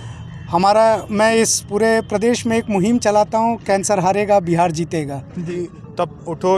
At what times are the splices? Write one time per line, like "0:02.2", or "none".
0:05.5